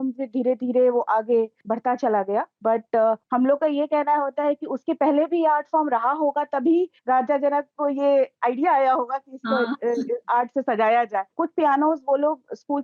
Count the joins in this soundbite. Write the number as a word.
three